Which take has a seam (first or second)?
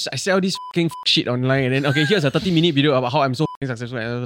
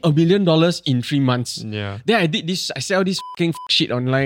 first